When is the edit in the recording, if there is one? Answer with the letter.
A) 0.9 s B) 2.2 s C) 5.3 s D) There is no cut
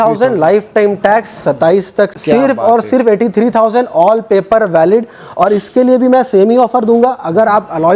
B